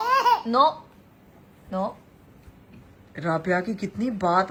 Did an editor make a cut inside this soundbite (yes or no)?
no